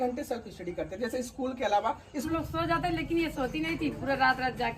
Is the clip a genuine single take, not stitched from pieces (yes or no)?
no